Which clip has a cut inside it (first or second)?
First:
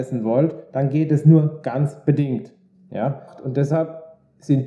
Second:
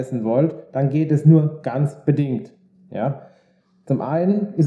first